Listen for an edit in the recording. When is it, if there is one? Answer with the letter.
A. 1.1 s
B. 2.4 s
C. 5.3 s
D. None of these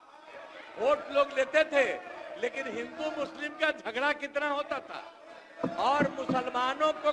D